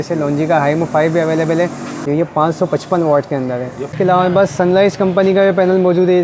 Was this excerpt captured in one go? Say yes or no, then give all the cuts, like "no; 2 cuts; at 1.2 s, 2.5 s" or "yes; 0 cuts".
no; 2 cuts; at 2.0 s, 3.9 s